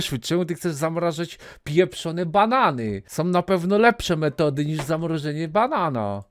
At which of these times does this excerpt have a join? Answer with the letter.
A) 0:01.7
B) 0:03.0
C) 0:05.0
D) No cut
B